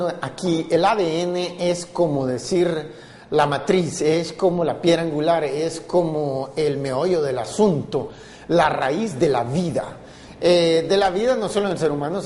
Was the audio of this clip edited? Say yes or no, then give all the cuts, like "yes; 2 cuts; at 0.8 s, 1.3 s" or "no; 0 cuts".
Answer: no; 0 cuts